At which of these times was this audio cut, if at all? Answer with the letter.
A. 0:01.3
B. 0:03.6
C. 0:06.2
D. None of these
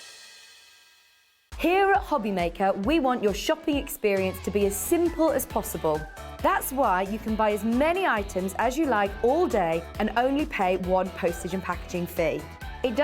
A